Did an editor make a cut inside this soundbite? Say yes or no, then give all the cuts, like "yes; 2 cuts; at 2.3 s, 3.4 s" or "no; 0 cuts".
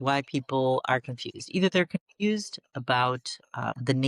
no; 0 cuts